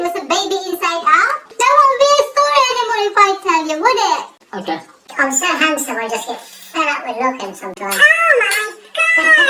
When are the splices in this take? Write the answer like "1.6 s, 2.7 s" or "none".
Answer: 1.4 s, 5.1 s